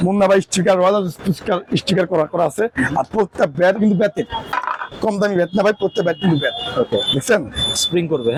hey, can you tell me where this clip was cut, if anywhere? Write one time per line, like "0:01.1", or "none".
none